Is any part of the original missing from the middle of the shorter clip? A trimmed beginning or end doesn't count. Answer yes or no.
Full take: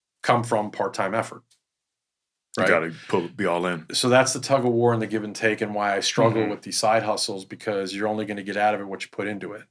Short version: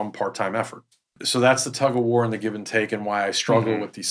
yes